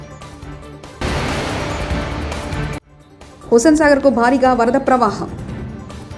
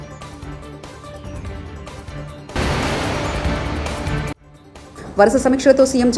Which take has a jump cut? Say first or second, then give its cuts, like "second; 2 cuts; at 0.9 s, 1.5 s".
second; 3 cuts; at 1.0 s, 2.5 s, 4.3 s